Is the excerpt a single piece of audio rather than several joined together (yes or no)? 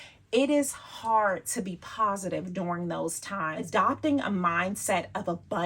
no